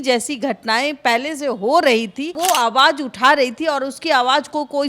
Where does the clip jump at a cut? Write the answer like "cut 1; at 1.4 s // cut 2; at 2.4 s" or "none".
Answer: cut 1; at 2.4 s